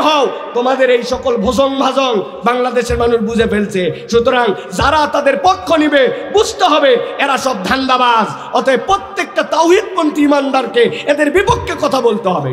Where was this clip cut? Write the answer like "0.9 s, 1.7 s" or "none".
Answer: none